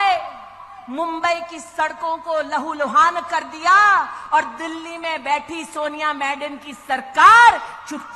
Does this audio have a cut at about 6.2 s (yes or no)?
no